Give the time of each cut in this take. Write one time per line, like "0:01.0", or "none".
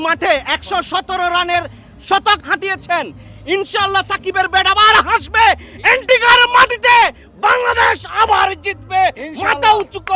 0:02.4